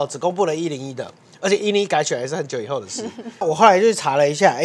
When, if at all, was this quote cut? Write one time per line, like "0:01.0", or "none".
0:03.4